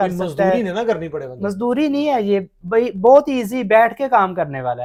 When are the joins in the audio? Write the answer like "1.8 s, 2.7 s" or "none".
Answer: none